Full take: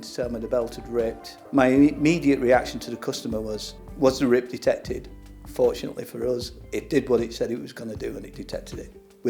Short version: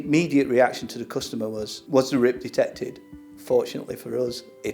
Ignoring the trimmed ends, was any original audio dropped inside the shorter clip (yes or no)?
yes